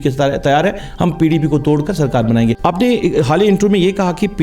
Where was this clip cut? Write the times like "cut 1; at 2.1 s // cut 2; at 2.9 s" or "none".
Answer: cut 1; at 2.6 s